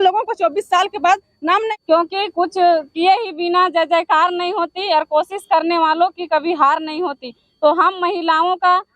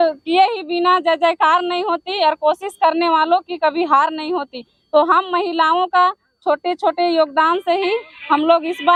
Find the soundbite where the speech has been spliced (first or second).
first